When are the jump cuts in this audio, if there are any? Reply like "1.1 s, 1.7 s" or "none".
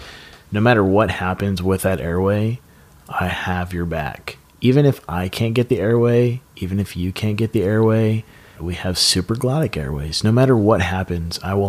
8.6 s

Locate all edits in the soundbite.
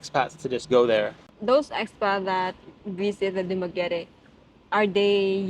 1.2 s

